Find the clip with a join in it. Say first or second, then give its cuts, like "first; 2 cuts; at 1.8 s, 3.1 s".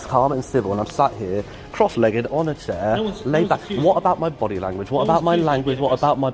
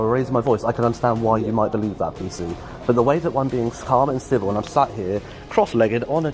second; 1 cut; at 2.7 s